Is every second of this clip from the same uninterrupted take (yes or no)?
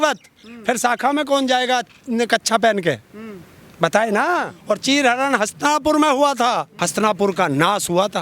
no